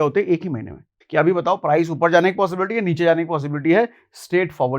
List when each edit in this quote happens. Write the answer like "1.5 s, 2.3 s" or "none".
0.9 s